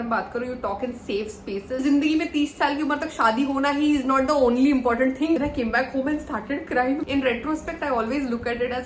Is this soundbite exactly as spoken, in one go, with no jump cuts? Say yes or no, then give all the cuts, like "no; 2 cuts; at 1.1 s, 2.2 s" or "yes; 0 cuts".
no; 3 cuts; at 1.8 s, 5.4 s, 7.0 s